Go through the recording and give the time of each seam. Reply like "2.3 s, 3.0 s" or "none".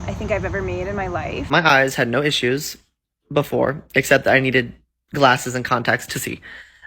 1.5 s